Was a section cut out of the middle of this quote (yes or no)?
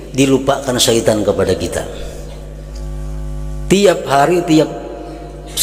yes